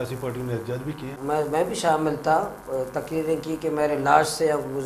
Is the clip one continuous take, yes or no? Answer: no